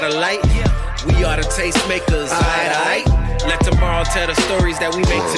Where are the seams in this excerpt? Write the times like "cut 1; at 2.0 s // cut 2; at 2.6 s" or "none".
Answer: none